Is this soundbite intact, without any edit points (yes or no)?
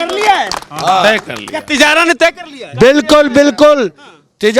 yes